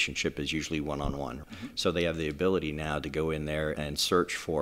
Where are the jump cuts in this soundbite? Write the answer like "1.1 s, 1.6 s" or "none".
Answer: 1.4 s, 3.8 s